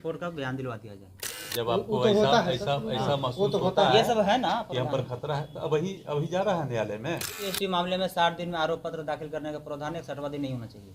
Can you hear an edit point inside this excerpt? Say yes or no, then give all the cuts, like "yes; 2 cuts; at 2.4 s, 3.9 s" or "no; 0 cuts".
yes; 2 cuts; at 1.4 s, 7.5 s